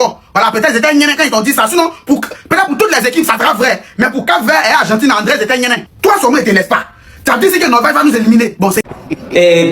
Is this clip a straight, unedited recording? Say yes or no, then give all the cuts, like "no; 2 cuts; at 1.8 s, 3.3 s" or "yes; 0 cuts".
no; 1 cut; at 8.8 s